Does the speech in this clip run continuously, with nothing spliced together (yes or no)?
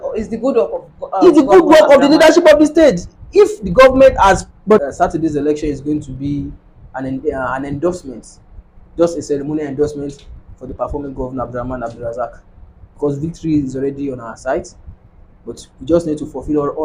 no